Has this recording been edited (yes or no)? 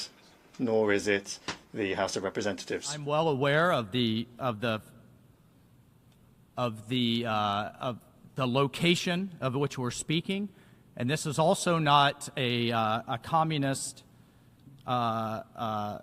yes